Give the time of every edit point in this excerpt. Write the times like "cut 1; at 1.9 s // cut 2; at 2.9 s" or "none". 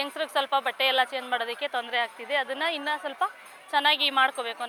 none